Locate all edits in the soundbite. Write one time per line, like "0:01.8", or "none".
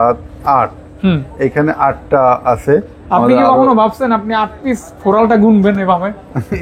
none